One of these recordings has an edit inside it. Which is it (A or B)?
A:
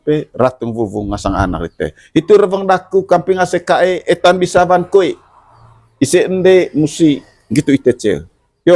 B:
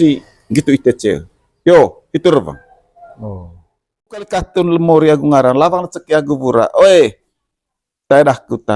B